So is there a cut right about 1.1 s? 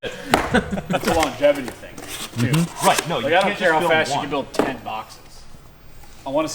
yes; 1 cut; at 1.1 s

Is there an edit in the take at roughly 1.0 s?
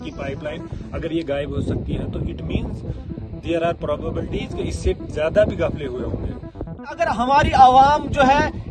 no; 1 cut; at 7.0 s

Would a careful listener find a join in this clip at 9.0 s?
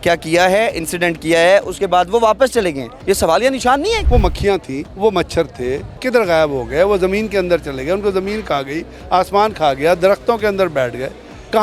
no; 3 cuts; at 2.9 s, 4.3 s, 6.0 s

